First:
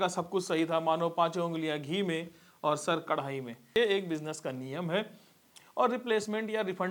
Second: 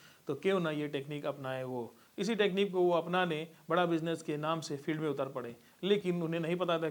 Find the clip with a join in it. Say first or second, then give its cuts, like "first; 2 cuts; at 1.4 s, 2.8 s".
first; 1 cut; at 3.7 s